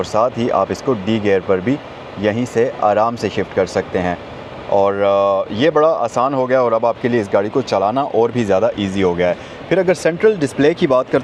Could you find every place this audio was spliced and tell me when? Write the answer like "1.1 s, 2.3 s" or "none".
none